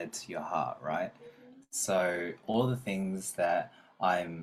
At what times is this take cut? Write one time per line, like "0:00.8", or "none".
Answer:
none